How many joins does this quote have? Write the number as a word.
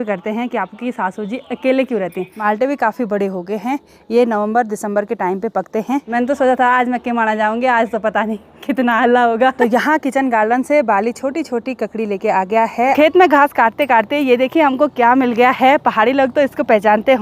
four